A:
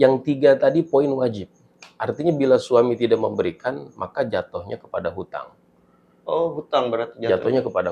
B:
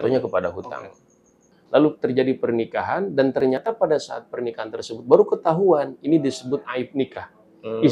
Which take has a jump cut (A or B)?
B